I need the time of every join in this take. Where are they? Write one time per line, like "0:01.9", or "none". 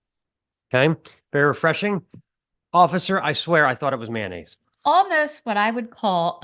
0:04.6